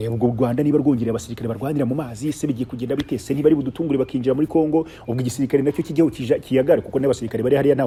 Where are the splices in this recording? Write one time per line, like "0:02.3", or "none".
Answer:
none